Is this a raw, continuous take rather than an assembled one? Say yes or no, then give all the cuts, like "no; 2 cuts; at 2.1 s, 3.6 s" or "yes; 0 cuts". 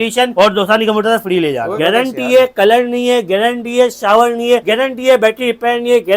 no; 2 cuts; at 1.7 s, 4.6 s